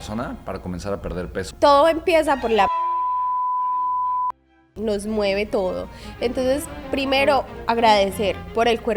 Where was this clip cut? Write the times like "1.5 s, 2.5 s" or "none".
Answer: 1.5 s